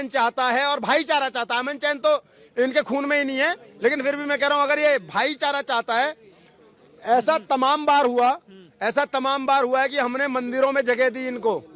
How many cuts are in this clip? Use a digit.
0